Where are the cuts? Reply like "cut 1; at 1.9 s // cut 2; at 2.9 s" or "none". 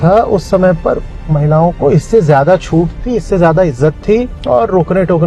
cut 1; at 4.3 s